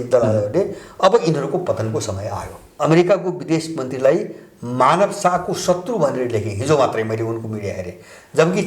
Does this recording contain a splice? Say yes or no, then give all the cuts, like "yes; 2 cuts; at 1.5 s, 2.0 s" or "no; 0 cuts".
yes; 1 cut; at 2.6 s